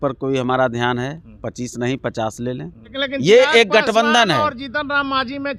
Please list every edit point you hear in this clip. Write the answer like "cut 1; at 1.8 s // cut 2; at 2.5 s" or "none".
cut 1; at 3.0 s